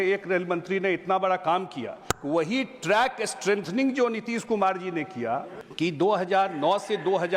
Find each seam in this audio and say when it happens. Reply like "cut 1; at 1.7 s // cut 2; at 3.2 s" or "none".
cut 1; at 2.1 s // cut 2; at 5.6 s